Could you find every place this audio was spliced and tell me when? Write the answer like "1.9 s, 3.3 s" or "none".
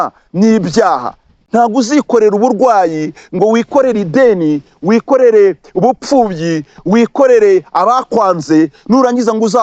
1.3 s